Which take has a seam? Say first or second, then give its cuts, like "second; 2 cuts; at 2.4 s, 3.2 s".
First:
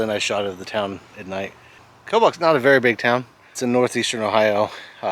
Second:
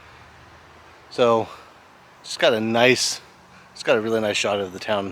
first; 2 cuts; at 1.9 s, 3.6 s